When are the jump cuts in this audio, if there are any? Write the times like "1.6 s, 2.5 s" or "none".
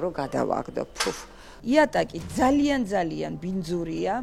1.5 s